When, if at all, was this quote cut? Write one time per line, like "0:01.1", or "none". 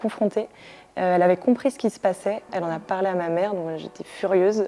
0:02.4